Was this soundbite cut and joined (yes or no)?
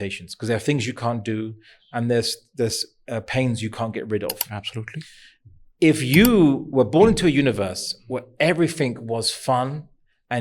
no